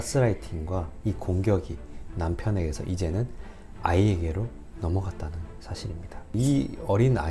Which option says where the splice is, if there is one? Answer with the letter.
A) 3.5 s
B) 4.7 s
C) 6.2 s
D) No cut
C